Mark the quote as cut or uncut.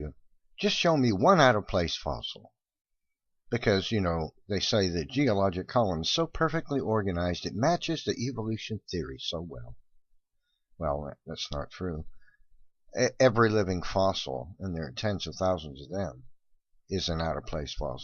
cut